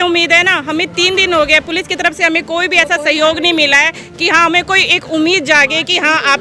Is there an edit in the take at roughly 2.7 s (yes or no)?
no